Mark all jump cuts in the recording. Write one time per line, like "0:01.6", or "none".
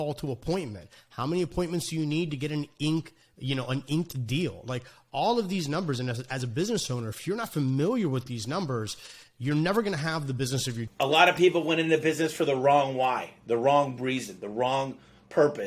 0:10.8